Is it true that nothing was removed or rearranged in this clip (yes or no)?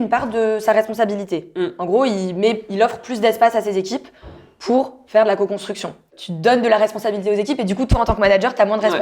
no